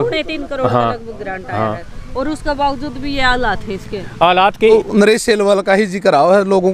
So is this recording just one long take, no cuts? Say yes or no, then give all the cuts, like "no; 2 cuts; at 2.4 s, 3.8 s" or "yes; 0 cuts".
no; 1 cut; at 4.7 s